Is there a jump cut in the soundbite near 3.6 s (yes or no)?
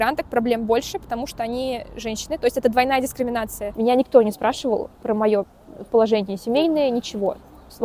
yes